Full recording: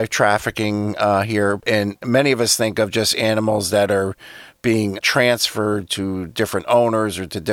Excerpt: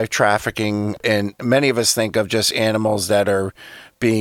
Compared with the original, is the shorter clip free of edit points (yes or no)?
no